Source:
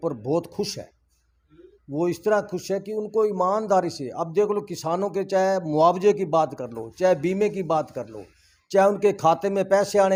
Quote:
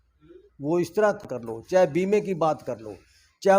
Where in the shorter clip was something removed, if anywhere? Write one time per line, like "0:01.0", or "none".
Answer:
0:01.3